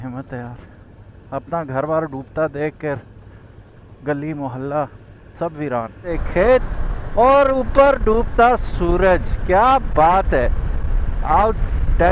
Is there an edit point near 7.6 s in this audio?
no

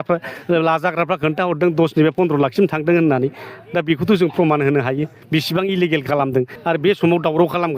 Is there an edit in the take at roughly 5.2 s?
yes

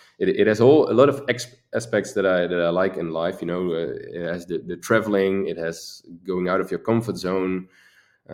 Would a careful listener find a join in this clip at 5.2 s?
no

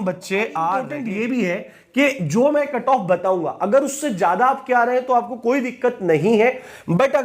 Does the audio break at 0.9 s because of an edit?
yes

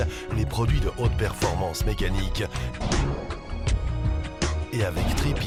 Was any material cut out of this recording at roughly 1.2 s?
no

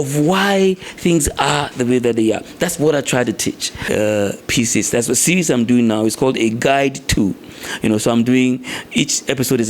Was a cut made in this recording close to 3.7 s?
yes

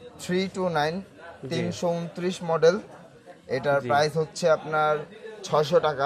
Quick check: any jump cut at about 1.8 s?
no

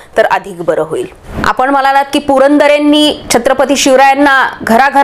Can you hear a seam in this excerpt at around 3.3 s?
no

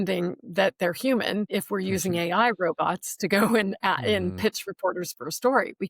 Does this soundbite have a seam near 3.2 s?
no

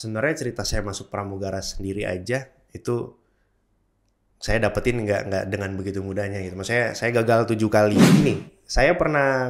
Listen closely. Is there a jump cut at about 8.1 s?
yes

